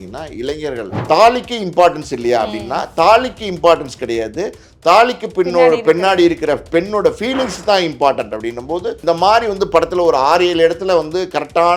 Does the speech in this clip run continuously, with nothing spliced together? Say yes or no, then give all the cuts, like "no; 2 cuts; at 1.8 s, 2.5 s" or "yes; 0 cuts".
no; 2 cuts; at 1.0 s, 9.0 s